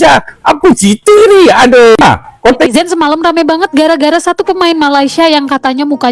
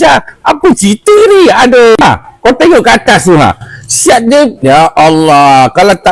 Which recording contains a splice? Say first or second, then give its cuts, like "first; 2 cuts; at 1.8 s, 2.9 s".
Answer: first; 1 cut; at 2.7 s